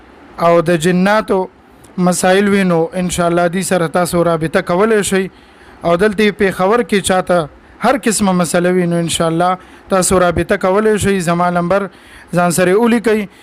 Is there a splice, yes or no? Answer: no